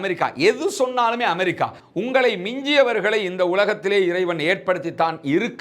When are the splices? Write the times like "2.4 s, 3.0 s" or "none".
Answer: 1.8 s